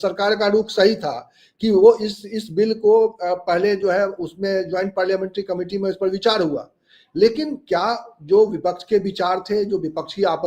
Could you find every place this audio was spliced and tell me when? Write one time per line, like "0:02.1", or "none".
none

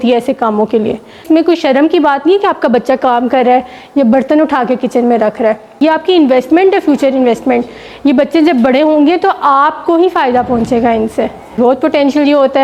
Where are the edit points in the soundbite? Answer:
0:01.2
0:05.8
0:11.6

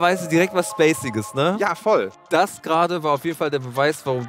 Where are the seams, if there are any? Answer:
0:02.1

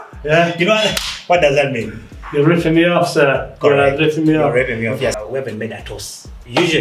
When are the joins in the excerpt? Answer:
0:05.1

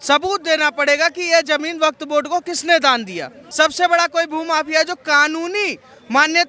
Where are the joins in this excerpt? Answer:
0:03.4

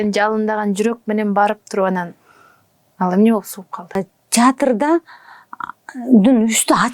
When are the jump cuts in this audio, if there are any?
0:03.9

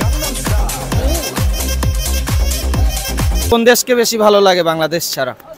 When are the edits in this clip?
0:03.5

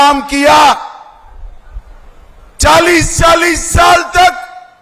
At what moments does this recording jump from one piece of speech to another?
none

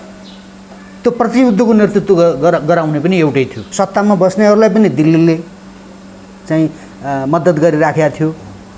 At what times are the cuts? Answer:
0:03.6

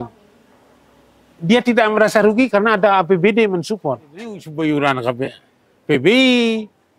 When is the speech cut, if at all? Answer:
0:04.4

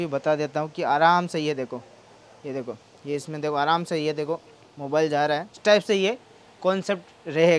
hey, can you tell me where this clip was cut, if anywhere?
0:05.5

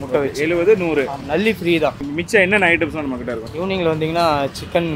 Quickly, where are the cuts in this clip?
none

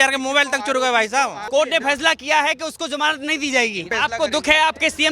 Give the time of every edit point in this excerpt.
0:01.4
0:03.9

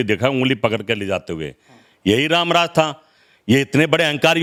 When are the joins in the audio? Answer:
none

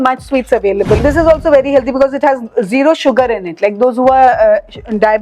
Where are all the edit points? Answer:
0:01.0

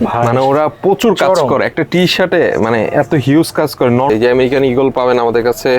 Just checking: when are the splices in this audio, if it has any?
0:04.1

